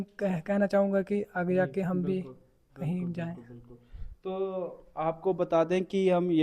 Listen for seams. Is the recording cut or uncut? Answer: uncut